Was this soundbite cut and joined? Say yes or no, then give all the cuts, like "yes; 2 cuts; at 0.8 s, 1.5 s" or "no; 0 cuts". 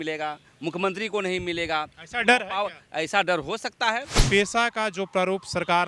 yes; 1 cut; at 4.1 s